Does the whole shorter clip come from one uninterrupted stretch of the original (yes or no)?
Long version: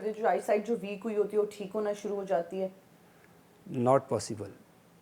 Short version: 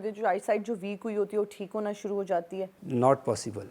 no